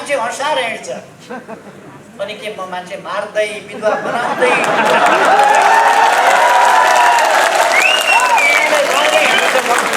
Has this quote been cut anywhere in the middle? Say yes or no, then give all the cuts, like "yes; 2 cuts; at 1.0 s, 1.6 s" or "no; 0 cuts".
no; 0 cuts